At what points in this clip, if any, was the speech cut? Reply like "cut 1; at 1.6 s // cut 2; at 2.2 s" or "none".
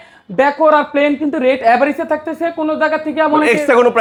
none